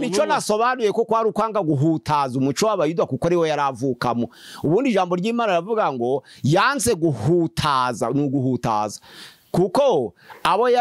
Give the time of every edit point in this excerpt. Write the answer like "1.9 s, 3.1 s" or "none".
none

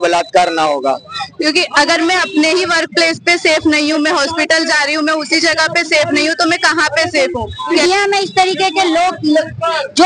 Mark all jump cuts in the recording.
1.3 s, 7.8 s

